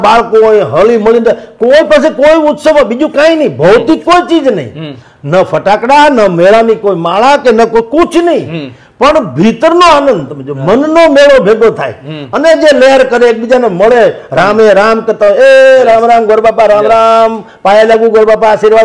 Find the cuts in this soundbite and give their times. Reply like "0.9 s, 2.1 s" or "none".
none

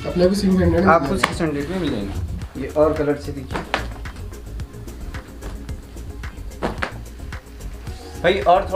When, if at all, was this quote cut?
none

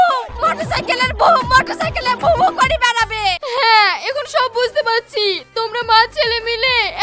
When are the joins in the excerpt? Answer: 3.4 s

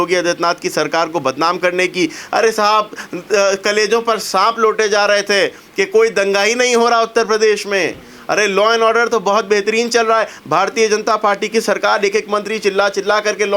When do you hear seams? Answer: none

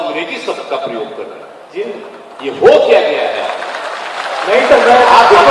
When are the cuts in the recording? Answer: none

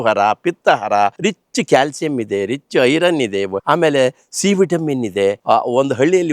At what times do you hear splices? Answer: 1.2 s, 3.6 s, 5.4 s

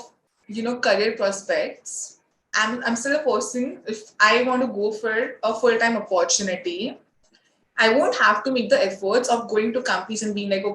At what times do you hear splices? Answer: 2.4 s

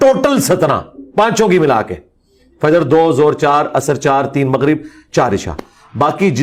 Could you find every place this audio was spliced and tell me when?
none

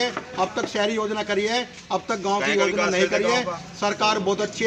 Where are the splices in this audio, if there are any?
none

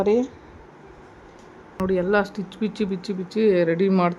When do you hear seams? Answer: 1.8 s

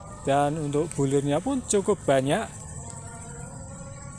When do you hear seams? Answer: 2.9 s

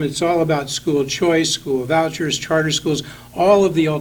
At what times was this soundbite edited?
none

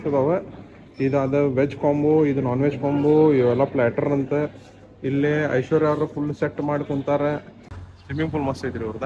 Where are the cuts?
7.5 s

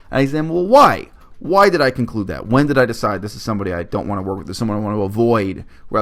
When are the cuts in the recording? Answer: none

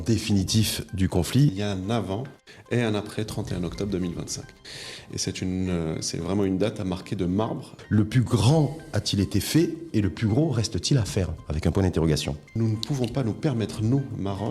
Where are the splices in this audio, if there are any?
1.5 s, 7.7 s, 12.4 s

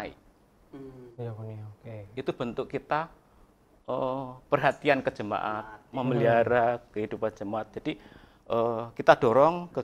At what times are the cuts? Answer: none

